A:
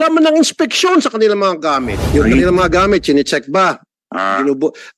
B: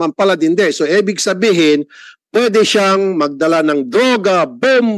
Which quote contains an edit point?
A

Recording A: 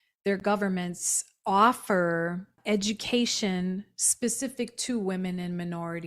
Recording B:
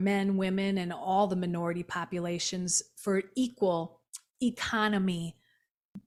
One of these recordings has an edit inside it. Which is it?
A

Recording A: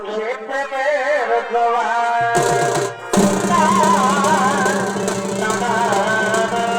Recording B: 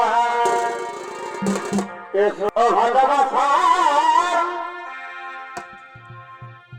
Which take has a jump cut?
B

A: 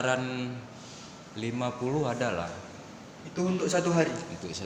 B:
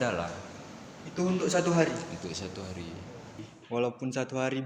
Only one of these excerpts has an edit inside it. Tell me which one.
B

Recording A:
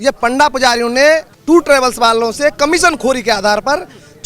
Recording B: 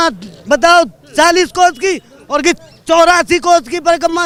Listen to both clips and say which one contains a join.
A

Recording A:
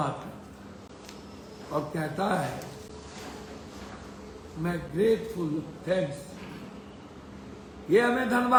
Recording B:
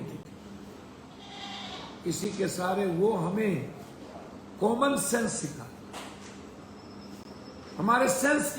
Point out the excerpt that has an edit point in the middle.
B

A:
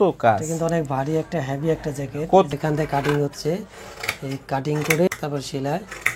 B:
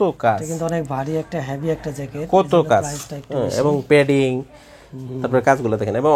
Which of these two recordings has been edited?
A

